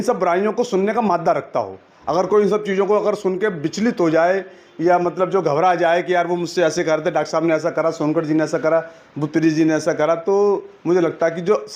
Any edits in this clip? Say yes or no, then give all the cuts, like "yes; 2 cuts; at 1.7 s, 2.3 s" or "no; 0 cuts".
no; 0 cuts